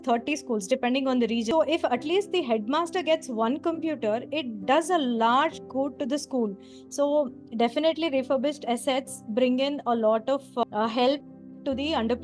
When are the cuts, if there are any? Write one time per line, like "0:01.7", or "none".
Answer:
0:01.5